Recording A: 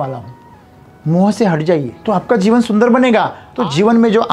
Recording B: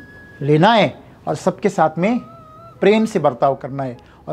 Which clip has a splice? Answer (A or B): A